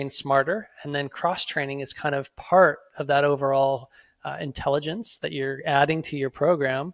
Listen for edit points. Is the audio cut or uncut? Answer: uncut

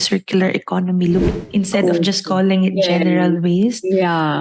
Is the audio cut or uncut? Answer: cut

